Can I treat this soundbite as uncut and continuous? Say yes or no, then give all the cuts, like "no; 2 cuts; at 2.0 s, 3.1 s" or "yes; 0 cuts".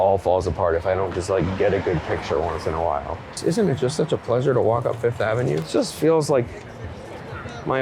no; 2 cuts; at 3.3 s, 5.7 s